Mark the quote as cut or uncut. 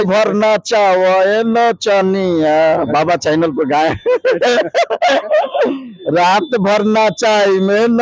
uncut